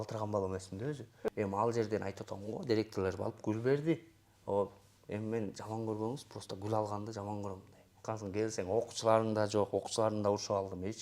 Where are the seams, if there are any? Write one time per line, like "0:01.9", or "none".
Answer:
0:01.3
0:08.0